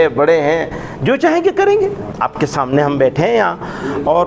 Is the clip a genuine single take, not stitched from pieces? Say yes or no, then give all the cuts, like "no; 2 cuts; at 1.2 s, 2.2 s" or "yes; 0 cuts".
no; 1 cut; at 2.1 s